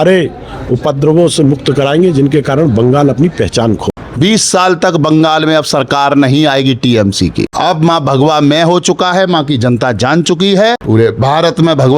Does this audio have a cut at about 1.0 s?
no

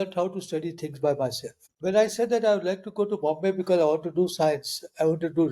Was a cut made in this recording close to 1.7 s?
yes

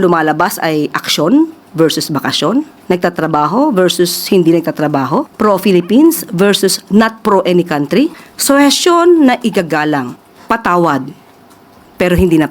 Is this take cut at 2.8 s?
yes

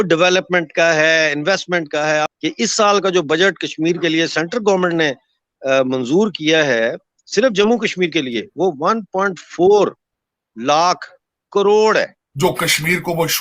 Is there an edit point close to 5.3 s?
no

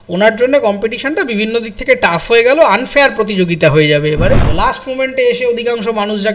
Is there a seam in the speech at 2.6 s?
no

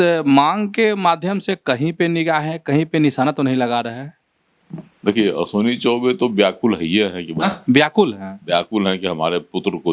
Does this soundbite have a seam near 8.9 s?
no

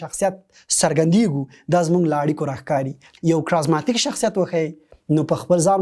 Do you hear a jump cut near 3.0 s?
yes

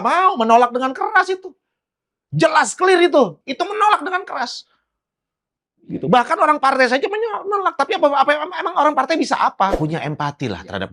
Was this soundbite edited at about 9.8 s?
yes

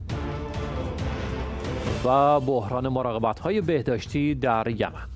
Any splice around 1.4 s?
yes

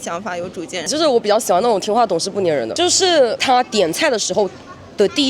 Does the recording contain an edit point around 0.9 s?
yes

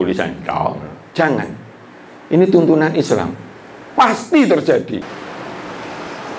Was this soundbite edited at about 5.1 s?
yes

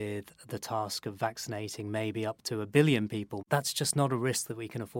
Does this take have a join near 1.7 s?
no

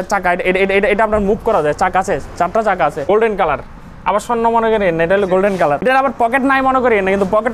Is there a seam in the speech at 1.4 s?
no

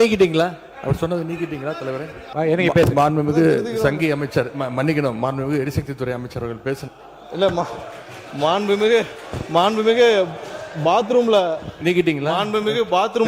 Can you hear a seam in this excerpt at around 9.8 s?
no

